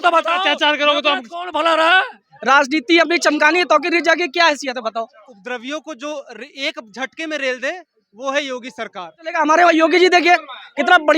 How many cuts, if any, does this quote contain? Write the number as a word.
three